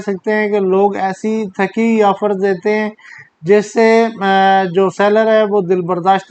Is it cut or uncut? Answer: uncut